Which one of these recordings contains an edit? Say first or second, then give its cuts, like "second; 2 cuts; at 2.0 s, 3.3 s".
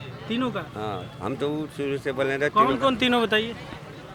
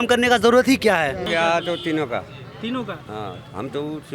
second; 1 cut; at 1.3 s